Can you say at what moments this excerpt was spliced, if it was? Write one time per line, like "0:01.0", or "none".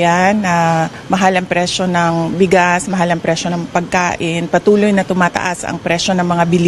none

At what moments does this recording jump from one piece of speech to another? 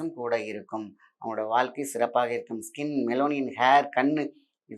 none

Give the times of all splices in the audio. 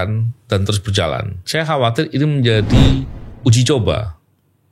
0:01.4

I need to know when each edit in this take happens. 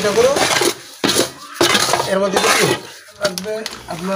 0:03.2

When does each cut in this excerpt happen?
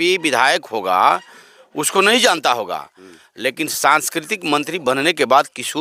none

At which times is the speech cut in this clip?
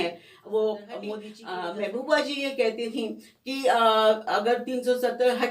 0:00.9

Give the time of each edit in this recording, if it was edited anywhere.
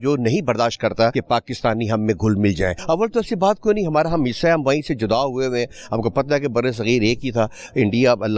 0:01.2
0:02.8

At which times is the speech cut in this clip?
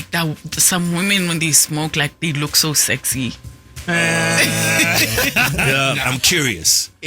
0:05.7

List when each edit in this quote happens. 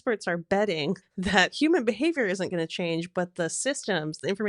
0:01.1

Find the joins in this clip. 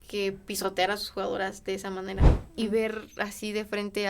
0:02.4

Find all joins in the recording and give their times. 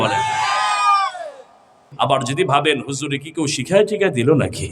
0:01.8

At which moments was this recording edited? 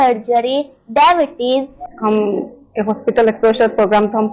0:01.8

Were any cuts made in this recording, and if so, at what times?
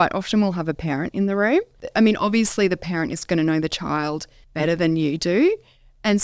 0:01.8
0:04.4

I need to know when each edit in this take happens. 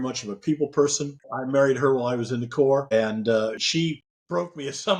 0:01.2
0:03.6

